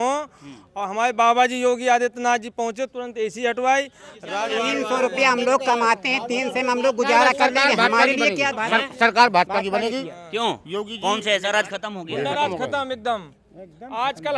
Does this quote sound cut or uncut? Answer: cut